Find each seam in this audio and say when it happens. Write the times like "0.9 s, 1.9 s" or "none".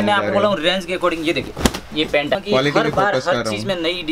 2.4 s